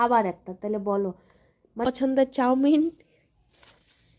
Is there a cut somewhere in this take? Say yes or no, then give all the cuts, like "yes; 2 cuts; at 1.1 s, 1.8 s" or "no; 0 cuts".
yes; 1 cut; at 1.9 s